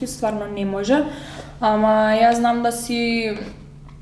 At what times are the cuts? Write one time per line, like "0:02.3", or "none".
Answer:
none